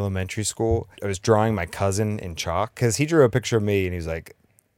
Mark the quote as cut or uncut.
cut